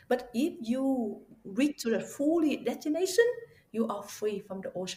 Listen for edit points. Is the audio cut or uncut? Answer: uncut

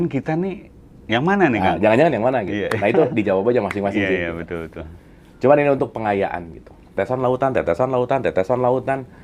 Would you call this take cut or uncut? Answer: cut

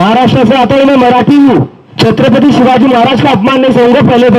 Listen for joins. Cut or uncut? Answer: cut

